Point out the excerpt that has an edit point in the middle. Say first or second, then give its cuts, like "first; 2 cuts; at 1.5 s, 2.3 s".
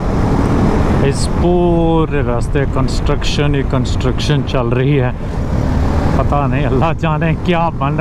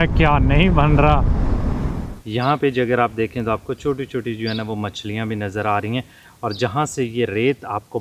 second; 1 cut; at 1.8 s